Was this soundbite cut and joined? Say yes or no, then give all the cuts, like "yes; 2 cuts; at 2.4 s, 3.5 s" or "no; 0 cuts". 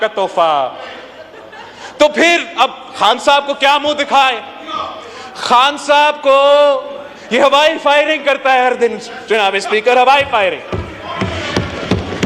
no; 0 cuts